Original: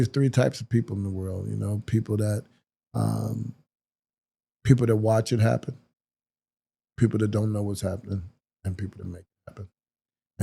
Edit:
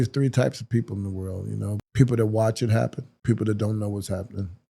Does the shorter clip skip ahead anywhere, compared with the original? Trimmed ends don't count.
yes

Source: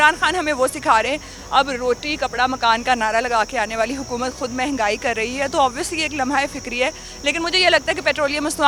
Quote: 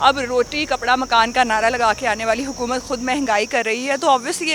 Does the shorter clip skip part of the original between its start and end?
no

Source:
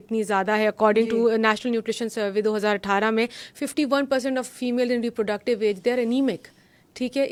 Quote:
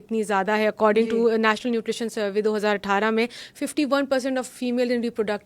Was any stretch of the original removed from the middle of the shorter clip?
no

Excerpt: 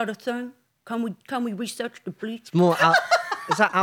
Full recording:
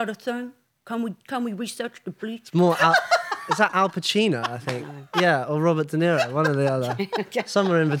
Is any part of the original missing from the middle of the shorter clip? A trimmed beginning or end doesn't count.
no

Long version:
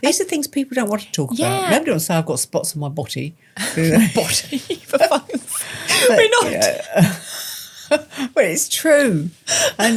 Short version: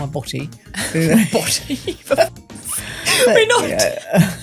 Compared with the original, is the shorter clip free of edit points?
yes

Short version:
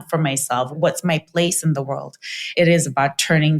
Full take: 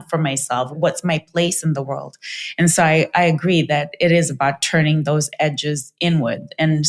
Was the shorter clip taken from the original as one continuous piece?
no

